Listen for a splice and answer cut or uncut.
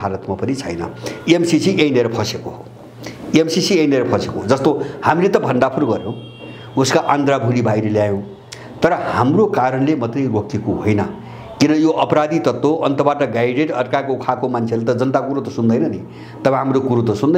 uncut